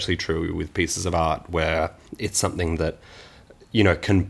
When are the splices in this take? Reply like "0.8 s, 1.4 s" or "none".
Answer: 2.0 s